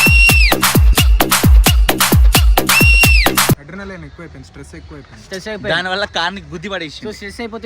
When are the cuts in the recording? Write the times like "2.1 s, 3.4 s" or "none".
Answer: 3.6 s